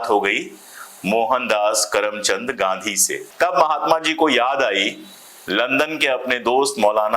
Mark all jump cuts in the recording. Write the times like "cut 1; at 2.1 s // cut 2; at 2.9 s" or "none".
cut 1; at 3.3 s